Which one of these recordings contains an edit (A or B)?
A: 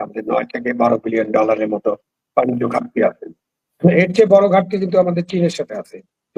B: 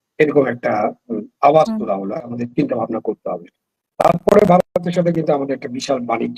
B